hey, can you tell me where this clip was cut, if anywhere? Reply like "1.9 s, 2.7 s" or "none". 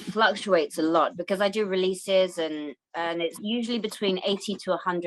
none